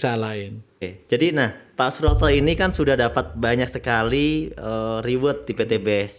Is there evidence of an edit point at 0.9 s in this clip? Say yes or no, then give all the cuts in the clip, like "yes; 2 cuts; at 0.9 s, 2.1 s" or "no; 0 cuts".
yes; 1 cut; at 0.9 s